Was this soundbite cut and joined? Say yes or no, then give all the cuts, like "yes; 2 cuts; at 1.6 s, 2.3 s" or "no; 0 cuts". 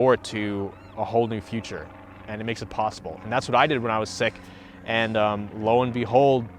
no; 0 cuts